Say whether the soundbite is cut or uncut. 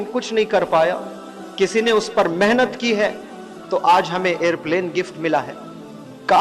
uncut